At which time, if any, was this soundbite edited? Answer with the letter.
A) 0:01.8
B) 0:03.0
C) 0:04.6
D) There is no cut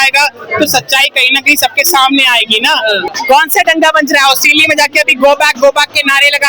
B